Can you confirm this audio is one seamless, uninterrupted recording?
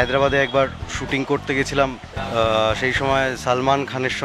no; 1 cut; at 2.1 s

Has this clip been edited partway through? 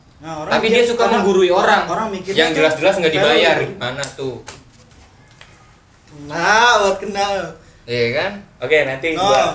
no; 0 cuts

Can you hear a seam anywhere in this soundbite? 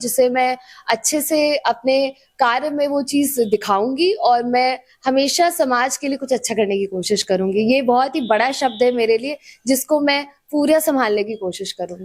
no; 0 cuts

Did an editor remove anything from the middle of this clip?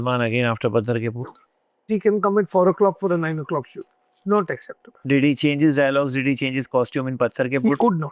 yes; 2 cuts; at 1.9 s, 4.9 s

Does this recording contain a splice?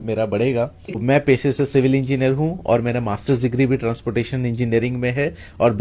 yes; 1 cut; at 1.0 s

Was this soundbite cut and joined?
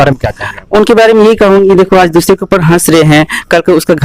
no; 0 cuts

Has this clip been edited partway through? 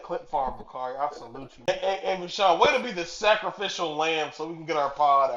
yes; 1 cut; at 1.7 s

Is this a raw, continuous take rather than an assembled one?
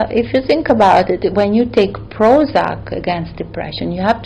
yes; 0 cuts

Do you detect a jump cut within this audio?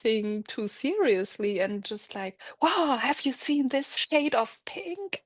yes; 1 cut; at 4.0 s

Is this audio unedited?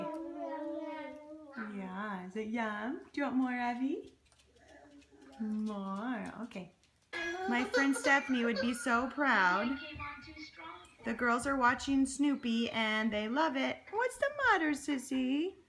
yes; 0 cuts

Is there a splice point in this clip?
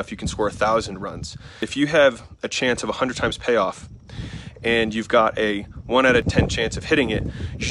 yes; 2 cuts; at 1.6 s, 6.2 s

